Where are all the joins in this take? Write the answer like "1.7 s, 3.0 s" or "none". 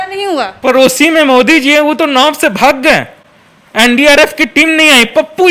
none